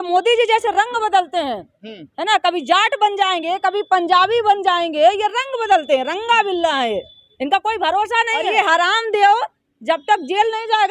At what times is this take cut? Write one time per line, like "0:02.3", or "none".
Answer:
0:08.5